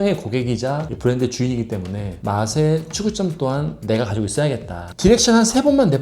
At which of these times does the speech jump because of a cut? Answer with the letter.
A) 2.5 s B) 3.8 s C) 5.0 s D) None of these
C